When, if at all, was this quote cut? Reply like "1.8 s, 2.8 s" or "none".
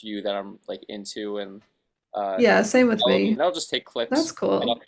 3.4 s